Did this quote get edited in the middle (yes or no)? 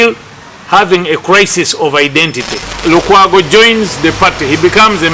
yes